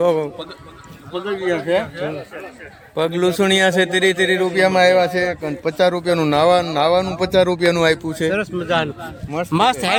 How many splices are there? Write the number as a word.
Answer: zero